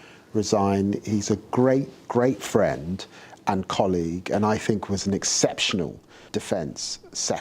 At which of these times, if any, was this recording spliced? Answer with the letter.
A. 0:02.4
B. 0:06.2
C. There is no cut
B